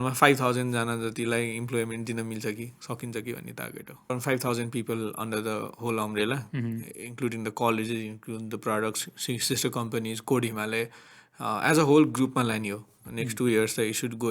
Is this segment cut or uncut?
cut